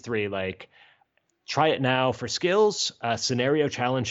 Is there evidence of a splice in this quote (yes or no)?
yes